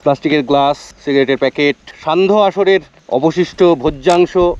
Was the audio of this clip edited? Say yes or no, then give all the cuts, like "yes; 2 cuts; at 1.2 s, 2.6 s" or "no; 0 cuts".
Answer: yes; 3 cuts; at 0.9 s, 1.9 s, 3.0 s